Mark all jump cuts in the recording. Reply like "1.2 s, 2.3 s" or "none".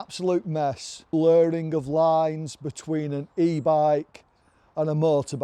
0.9 s